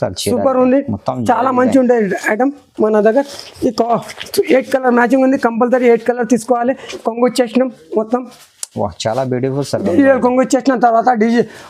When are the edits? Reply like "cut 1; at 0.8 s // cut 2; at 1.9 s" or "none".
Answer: cut 1; at 6.9 s